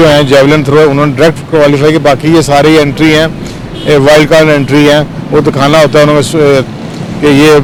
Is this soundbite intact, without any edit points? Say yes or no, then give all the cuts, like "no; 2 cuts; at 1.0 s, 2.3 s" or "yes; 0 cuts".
yes; 0 cuts